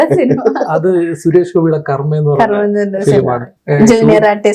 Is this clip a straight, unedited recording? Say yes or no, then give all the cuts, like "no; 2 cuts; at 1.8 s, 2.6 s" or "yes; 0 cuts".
no; 1 cut; at 3.5 s